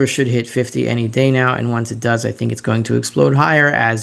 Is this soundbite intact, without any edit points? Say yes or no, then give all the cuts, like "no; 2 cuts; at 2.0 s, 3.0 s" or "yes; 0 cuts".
yes; 0 cuts